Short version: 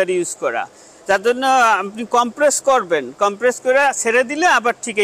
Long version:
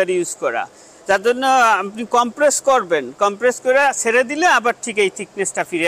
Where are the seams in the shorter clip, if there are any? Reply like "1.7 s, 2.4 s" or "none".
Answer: none